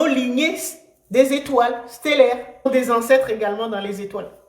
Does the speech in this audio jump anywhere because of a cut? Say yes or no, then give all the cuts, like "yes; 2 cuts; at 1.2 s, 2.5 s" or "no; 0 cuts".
yes; 1 cut; at 2.7 s